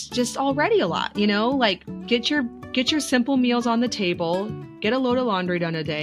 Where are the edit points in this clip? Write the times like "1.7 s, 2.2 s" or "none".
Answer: none